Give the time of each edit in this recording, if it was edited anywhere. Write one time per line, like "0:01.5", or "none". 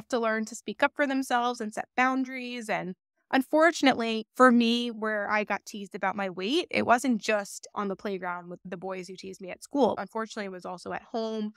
none